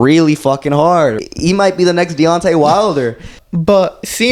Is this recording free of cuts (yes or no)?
no